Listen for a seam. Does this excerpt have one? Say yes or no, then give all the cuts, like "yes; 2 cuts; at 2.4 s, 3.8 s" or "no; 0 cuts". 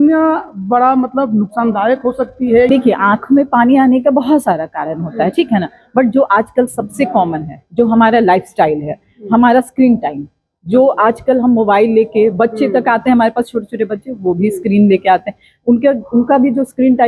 yes; 1 cut; at 2.7 s